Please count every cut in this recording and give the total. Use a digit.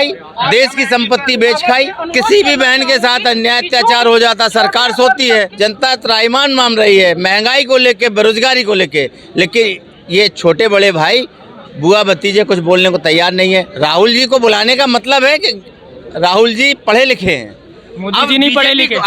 3